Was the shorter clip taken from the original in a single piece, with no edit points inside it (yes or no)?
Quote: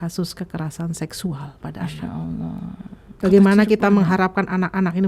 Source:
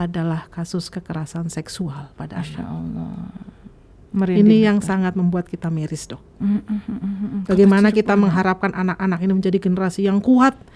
no